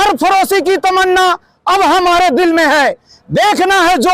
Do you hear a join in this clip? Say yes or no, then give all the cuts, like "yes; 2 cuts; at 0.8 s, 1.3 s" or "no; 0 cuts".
no; 0 cuts